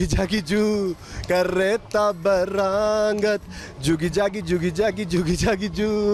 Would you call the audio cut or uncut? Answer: uncut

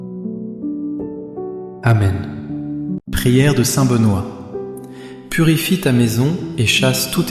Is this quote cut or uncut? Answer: uncut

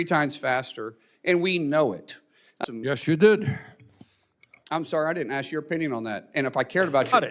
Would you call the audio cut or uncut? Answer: cut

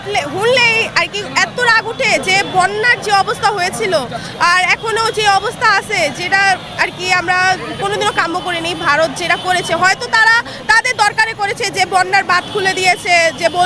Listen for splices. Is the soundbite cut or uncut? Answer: uncut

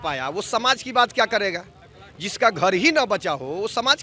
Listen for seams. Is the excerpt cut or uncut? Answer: uncut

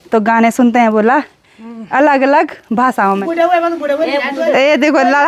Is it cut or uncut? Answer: cut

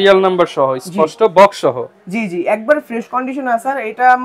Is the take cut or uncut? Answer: uncut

